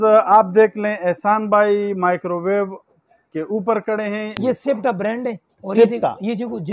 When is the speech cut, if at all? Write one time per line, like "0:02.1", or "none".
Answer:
0:04.4